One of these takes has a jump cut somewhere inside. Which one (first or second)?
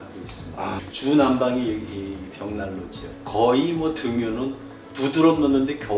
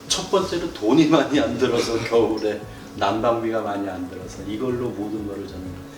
first